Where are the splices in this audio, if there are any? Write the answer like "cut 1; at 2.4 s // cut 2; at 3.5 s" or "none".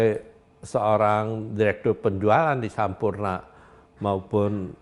none